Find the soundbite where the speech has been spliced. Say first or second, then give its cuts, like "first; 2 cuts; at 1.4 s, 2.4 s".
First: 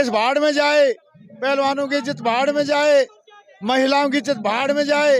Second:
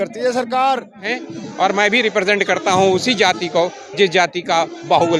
second; 1 cut; at 1.2 s